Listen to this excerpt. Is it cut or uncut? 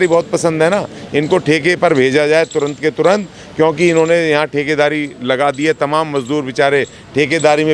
uncut